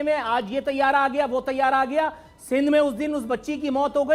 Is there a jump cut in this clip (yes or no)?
no